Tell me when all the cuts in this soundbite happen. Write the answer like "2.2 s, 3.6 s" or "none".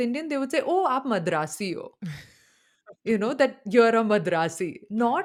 none